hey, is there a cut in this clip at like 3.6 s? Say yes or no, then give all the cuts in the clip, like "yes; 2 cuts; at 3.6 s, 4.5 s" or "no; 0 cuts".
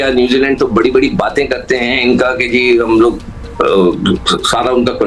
no; 0 cuts